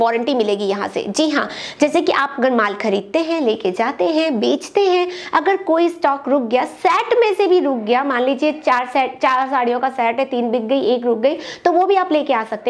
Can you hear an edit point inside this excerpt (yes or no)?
no